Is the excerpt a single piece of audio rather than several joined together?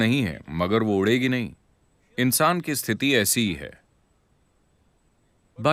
yes; 0 cuts

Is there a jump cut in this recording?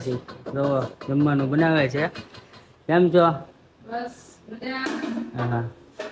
no; 0 cuts

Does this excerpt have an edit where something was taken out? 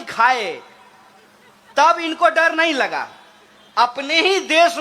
no; 0 cuts

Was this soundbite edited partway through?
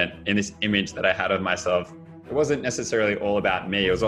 no; 0 cuts

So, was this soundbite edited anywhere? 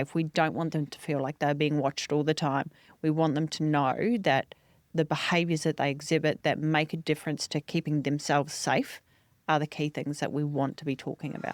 no; 0 cuts

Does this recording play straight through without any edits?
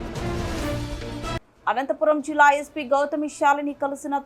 no; 1 cut; at 1.5 s

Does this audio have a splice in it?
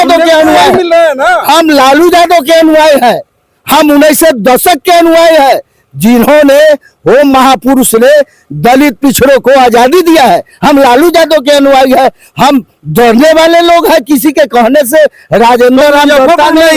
no; 0 cuts

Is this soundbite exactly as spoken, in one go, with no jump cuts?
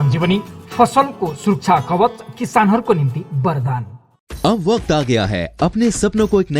yes; 0 cuts

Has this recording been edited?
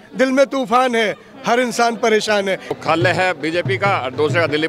yes; 1 cut; at 2.7 s

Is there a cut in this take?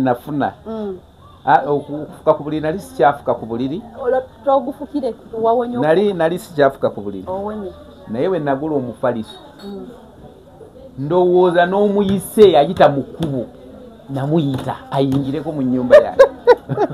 no; 0 cuts

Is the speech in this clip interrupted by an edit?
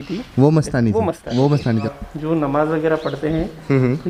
yes; 1 cut; at 1.9 s

